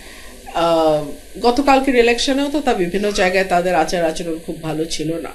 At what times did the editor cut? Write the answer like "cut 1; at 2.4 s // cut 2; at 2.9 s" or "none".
none